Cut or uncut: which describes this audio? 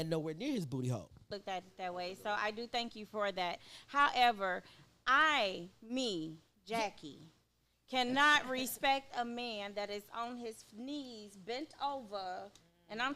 cut